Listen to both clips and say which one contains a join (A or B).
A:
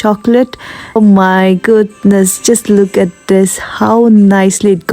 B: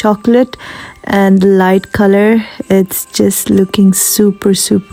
A